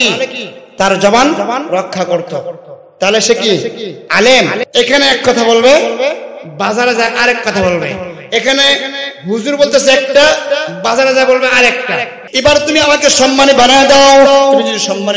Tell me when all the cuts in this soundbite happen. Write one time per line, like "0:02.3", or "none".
0:04.6
0:12.2